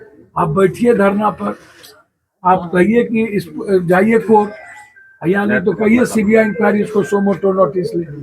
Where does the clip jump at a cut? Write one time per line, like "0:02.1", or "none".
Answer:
none